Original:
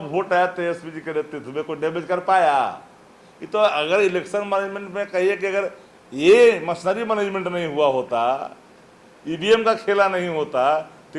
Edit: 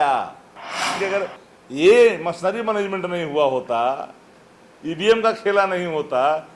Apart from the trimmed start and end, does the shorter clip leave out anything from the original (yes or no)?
yes